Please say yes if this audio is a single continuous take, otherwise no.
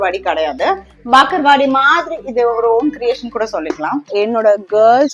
no